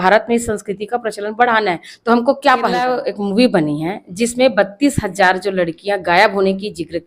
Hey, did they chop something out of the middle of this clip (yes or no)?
yes